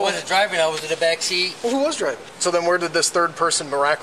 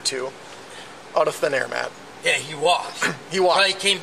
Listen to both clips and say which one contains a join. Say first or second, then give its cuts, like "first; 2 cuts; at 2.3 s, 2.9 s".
first; 1 cut; at 2.3 s